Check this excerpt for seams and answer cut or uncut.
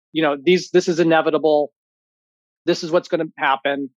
uncut